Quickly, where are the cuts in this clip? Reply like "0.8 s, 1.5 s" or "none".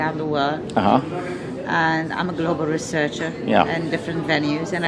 none